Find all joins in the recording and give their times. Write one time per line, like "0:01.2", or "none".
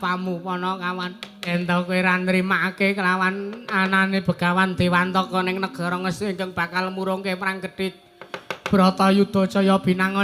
0:01.5